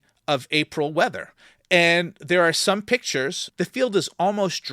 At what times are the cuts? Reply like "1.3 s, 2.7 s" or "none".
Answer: 3.4 s

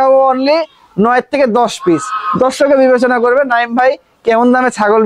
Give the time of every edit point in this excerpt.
none

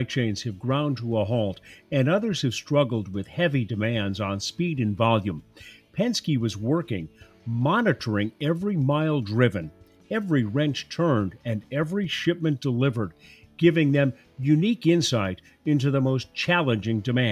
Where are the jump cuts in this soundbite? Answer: none

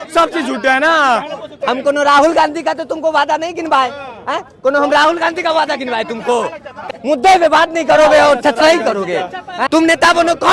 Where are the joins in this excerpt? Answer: 1.5 s, 6.9 s, 9.6 s

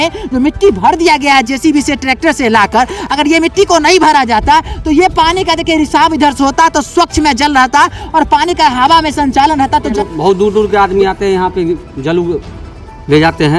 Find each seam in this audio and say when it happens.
9.9 s

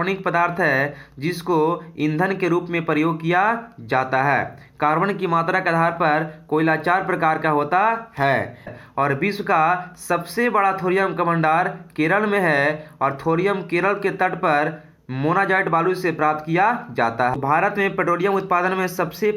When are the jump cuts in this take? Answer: 8.8 s, 17.3 s

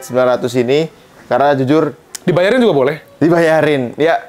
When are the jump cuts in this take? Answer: none

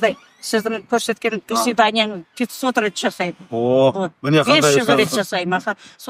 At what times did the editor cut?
none

